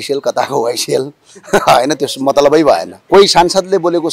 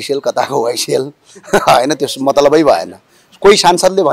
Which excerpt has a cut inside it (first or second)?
first